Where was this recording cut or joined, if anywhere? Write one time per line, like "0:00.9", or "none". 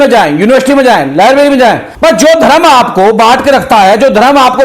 0:01.9